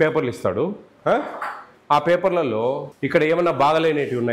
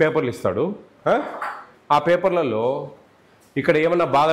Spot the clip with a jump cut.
first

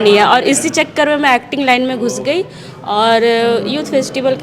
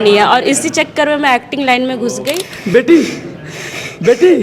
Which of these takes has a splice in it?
second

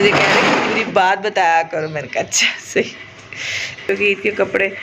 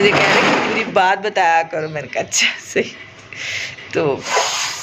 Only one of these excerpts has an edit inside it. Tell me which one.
first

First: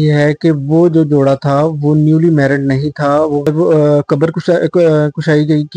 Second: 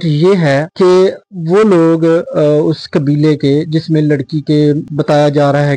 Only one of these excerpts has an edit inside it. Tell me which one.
first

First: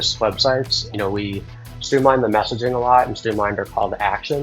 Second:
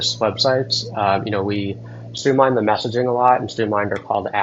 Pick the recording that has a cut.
first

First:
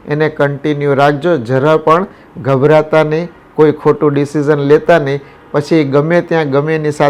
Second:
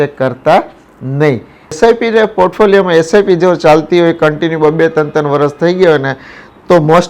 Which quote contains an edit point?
second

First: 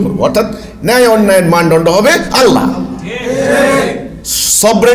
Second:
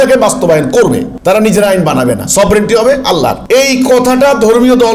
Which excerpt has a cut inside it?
second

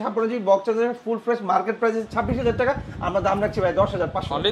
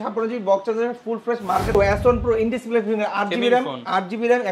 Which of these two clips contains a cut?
second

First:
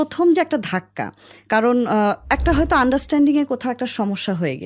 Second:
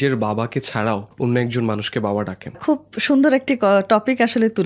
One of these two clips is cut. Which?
second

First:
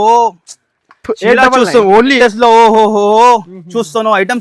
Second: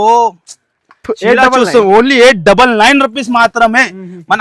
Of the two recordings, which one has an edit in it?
first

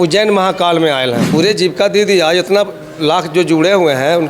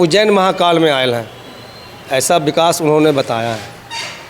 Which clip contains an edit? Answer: first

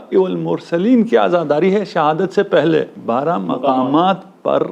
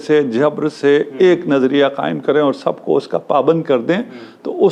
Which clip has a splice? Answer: first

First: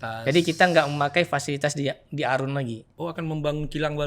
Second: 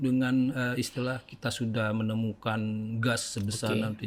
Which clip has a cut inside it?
first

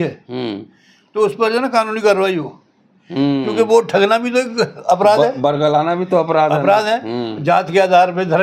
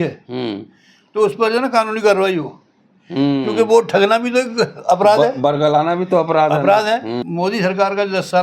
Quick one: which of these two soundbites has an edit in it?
second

